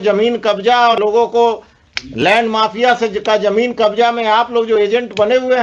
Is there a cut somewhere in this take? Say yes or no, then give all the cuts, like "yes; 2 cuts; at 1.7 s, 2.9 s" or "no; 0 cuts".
yes; 1 cut; at 0.9 s